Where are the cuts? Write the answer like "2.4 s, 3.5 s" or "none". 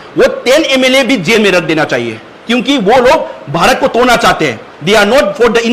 none